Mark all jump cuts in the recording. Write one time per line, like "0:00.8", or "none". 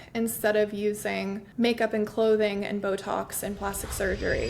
0:01.4